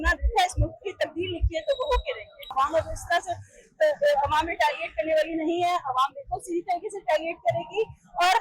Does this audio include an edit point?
yes; 1 cut; at 2.5 s

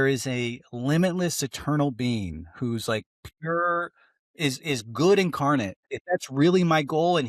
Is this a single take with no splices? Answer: no; 1 cut; at 5.9 s

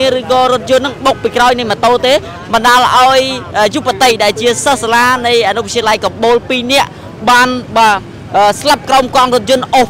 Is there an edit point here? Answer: no; 0 cuts

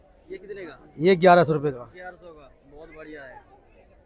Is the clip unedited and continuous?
yes; 0 cuts

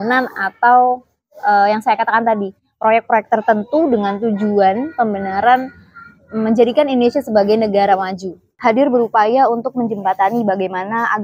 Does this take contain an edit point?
yes; 1 cut; at 8.5 s

